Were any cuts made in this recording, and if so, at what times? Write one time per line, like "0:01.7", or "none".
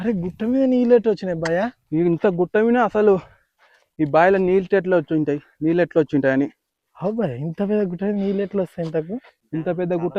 none

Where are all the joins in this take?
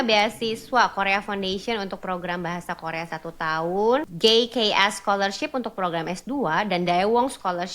0:04.1

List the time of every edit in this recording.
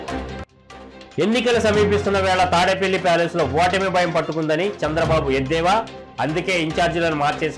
0:00.9

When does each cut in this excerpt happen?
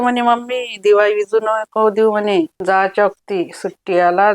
0:02.5

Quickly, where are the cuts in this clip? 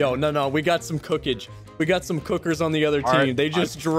none

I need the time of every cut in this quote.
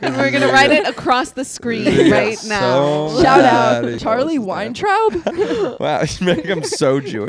0:04.0

